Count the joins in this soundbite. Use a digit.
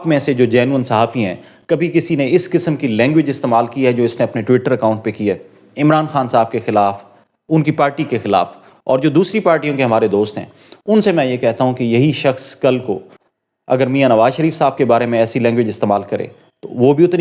0